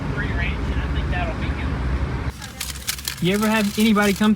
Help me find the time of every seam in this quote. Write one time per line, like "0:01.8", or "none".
0:02.3